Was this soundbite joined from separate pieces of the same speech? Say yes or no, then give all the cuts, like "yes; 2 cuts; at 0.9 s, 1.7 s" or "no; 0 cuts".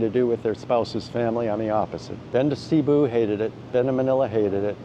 yes; 1 cut; at 2.0 s